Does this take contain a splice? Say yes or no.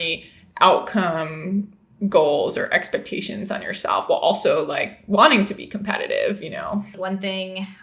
yes